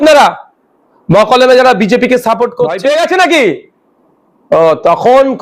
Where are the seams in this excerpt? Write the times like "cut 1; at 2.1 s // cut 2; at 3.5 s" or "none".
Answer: cut 1; at 2.8 s